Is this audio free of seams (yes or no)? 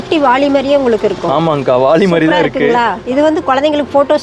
no